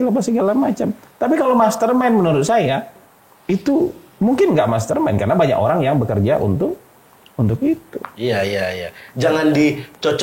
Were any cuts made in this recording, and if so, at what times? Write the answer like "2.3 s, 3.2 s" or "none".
none